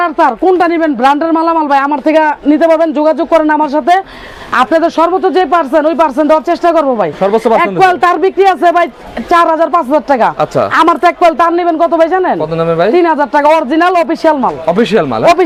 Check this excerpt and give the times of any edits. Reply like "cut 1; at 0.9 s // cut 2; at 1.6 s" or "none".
none

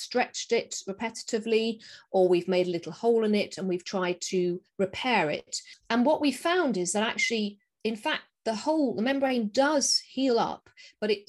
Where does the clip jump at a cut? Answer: none

